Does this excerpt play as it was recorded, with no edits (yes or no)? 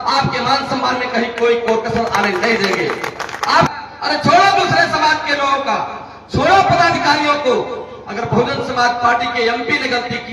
no